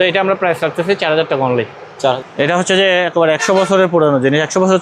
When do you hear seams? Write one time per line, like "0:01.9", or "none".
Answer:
0:02.2